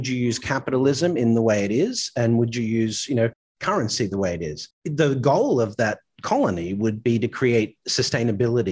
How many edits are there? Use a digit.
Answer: 0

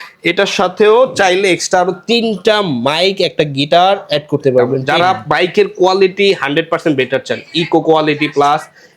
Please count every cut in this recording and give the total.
1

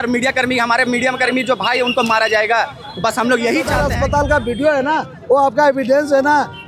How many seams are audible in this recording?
1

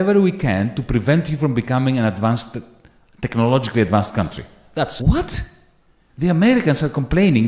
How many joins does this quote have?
1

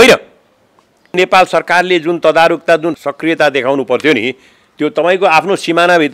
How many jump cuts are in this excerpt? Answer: 2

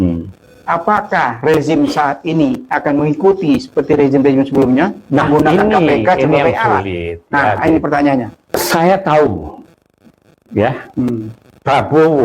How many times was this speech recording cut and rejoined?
1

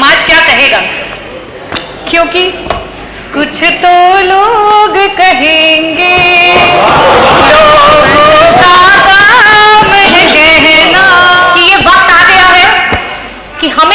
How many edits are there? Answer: 1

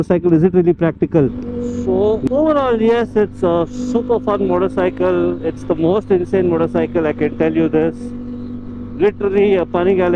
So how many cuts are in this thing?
1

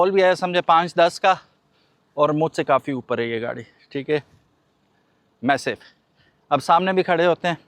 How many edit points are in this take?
0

